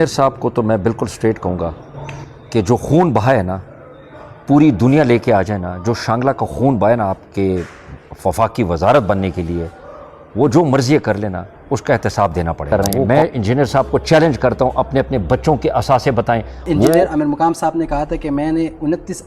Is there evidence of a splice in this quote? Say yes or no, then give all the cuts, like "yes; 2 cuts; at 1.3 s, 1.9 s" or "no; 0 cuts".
yes; 2 cuts; at 12.7 s, 17.0 s